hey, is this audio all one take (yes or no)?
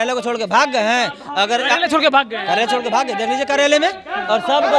yes